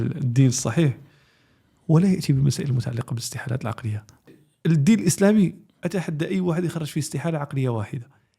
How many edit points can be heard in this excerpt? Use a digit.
1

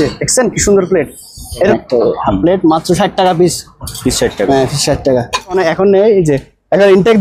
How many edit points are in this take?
2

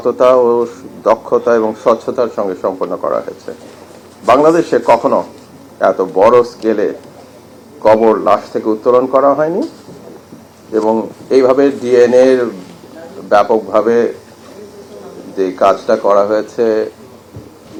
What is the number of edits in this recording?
0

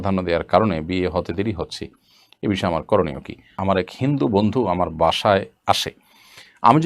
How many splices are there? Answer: 1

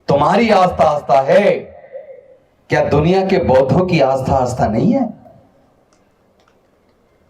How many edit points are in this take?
0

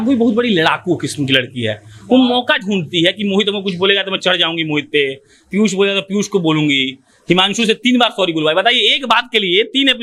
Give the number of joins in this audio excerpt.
0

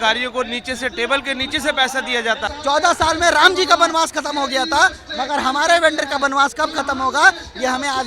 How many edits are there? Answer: 1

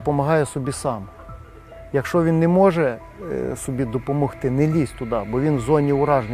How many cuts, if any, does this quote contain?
0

